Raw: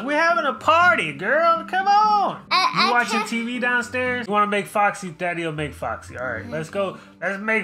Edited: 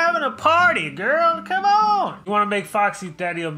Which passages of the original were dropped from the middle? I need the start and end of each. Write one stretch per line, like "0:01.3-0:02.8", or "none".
0:02.4-0:04.2